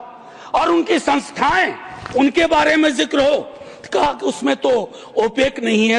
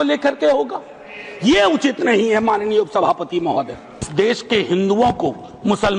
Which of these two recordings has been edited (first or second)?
second